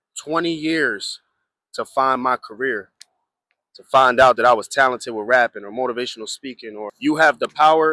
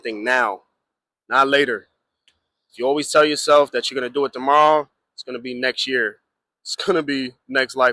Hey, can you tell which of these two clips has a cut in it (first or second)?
first